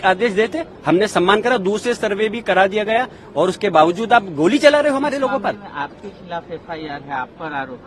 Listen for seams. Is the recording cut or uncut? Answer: uncut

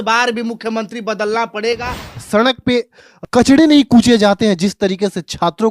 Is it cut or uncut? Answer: cut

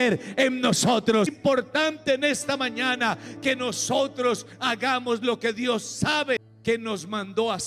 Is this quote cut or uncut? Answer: cut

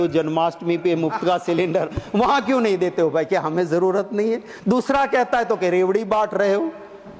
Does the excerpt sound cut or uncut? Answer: uncut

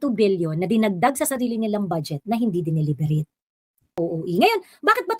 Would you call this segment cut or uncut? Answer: cut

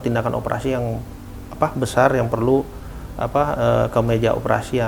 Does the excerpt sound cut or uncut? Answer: uncut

